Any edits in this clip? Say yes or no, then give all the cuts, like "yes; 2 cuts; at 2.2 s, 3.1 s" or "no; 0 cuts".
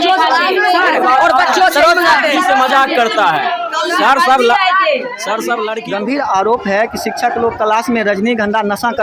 yes; 1 cut; at 5.8 s